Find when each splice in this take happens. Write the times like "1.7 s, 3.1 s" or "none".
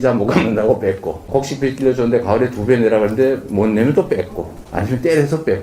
1.3 s